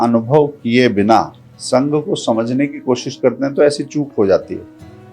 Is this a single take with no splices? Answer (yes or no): yes